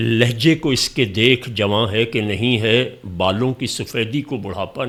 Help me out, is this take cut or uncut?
uncut